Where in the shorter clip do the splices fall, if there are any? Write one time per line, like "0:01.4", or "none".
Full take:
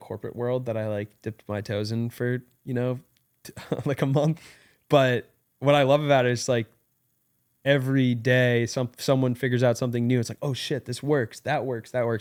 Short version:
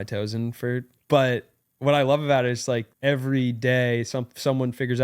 0:00.9
0:02.9